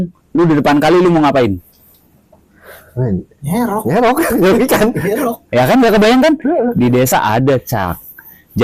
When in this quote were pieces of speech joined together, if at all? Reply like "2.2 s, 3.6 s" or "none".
none